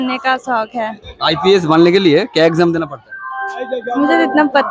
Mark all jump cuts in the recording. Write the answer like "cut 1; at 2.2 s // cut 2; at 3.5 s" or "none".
none